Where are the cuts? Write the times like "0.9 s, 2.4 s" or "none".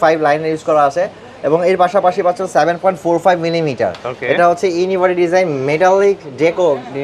none